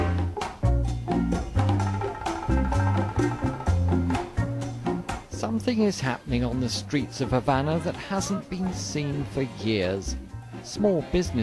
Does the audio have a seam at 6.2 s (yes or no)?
yes